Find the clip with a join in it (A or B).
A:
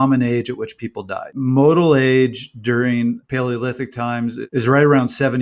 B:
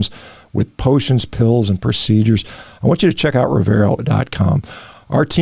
A